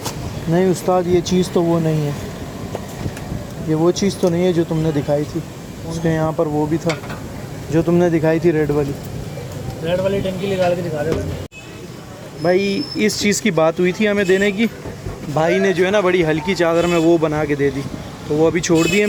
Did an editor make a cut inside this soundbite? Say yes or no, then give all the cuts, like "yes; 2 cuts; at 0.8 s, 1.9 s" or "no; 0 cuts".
no; 0 cuts